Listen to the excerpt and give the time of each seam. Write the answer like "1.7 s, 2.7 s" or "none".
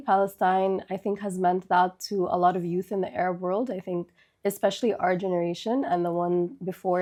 none